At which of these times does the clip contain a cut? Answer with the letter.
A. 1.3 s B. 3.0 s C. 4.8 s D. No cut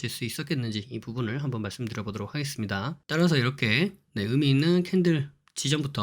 B